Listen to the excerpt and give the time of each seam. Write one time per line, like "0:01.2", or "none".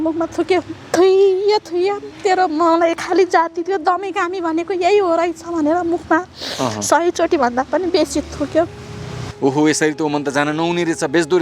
0:09.2